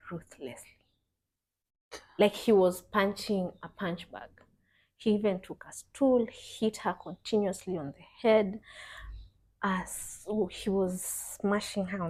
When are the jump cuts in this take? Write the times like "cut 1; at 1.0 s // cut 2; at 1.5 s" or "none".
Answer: none